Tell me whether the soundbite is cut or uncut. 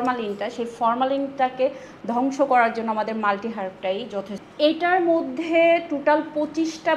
cut